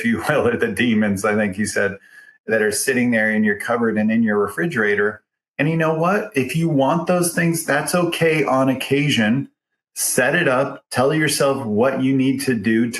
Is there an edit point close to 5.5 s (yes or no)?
no